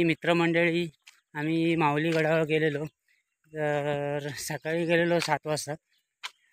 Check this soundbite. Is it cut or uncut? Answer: uncut